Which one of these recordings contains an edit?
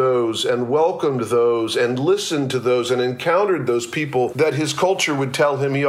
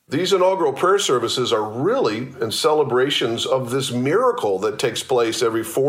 first; 1 cut; at 4.3 s

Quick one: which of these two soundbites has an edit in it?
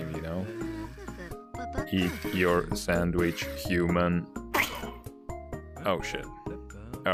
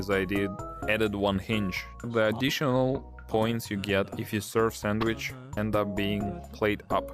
second; 2 cuts; at 1.9 s, 5.5 s

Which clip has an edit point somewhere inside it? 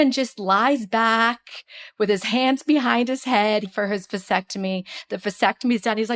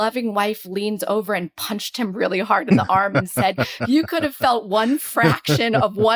first; 1 cut; at 3.7 s

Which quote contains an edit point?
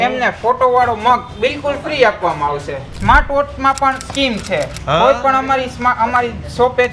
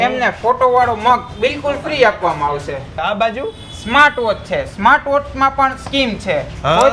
first; 1 cut; at 2.9 s

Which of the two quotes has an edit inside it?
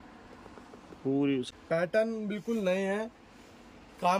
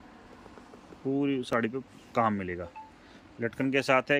first; 1 cut; at 1.5 s

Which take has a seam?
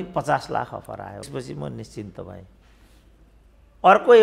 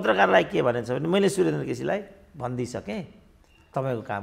first; 1 cut; at 1.3 s

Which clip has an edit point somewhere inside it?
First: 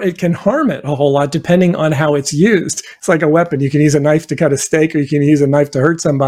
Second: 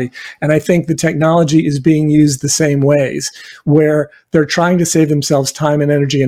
first; 1 cut; at 2.9 s

